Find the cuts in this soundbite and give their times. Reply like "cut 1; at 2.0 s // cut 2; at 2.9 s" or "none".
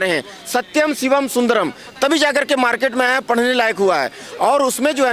none